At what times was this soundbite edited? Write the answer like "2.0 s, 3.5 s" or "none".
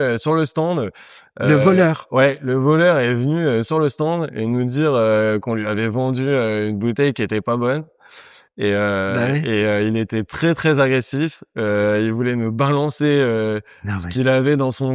none

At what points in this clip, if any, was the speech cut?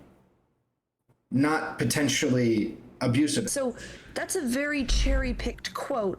3.5 s

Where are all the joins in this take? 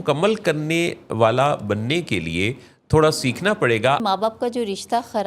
4.0 s

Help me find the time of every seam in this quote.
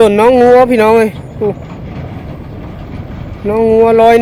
none

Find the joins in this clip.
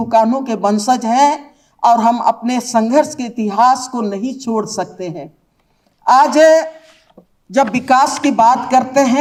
none

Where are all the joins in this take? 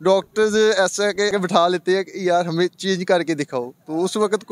1.3 s

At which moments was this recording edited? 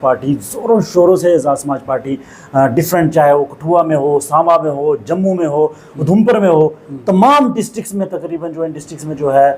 none

